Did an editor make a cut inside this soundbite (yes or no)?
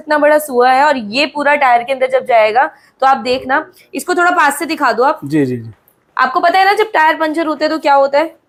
no